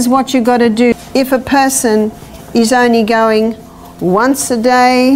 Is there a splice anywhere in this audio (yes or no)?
yes